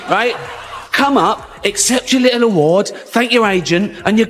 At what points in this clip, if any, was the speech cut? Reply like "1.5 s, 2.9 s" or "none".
none